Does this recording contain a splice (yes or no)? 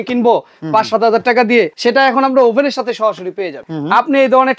yes